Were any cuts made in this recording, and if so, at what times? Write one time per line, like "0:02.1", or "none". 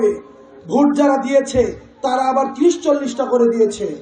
none